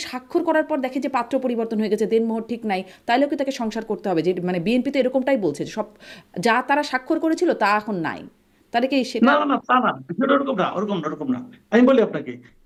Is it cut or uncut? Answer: uncut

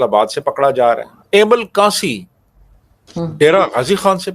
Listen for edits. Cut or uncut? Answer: cut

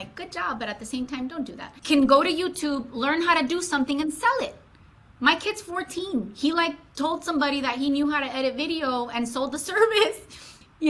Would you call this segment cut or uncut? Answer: cut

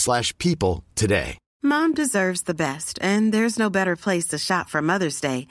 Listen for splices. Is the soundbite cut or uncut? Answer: cut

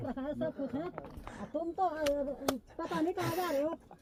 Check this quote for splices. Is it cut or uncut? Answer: uncut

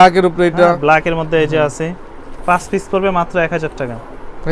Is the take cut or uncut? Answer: uncut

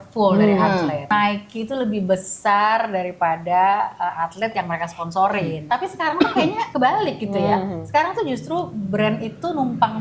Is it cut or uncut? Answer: cut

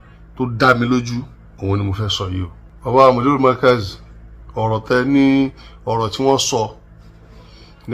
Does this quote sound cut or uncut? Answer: cut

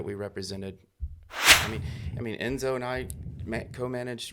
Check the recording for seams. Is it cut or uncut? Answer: cut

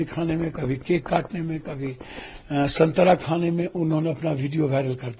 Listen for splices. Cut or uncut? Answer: uncut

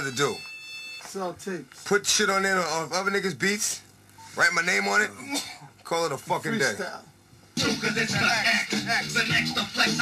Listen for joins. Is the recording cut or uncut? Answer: uncut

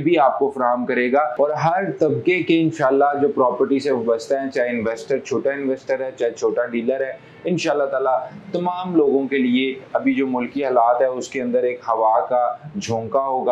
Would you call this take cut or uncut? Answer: uncut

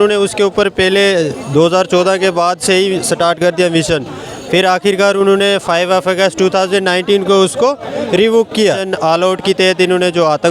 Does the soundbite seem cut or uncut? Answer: cut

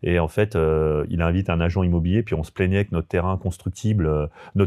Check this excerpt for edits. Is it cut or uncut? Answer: uncut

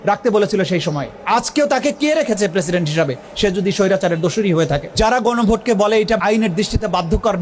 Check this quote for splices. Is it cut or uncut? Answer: cut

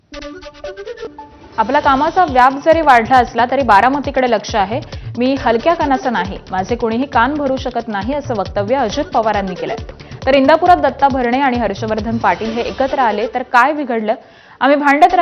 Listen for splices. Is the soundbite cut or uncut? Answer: cut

